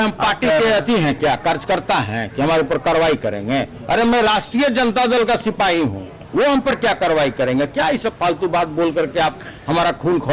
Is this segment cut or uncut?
uncut